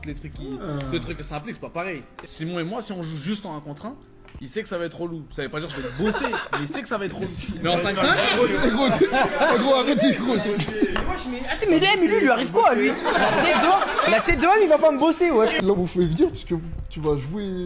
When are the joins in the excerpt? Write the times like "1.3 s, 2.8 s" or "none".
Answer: 1.5 s, 6.2 s